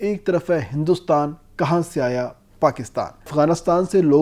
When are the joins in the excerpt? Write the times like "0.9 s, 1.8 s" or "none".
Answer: 3.3 s